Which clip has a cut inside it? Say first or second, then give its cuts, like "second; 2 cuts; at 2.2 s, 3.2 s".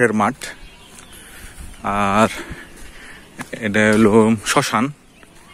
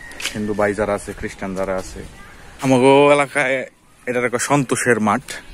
second; 1 cut; at 2.7 s